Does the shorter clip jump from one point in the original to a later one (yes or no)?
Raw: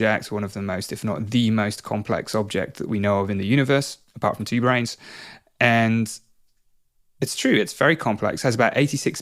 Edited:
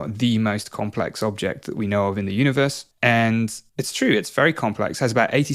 yes